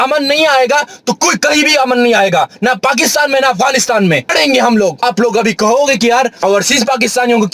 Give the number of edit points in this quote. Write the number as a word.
three